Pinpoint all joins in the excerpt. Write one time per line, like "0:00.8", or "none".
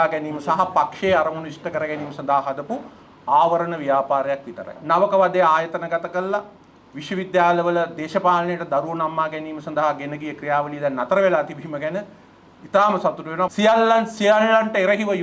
0:04.8
0:13.5